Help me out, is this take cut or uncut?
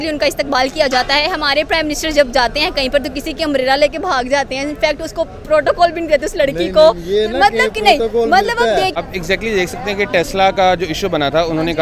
cut